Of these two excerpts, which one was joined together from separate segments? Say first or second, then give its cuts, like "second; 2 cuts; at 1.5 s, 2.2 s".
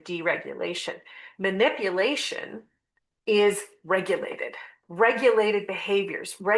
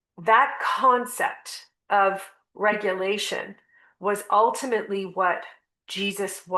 first; 1 cut; at 4.8 s